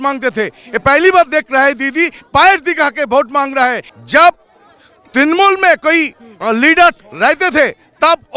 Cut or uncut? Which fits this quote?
cut